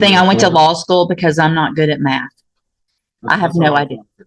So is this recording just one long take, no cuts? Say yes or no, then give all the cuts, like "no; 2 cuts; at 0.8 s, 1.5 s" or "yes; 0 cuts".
yes; 0 cuts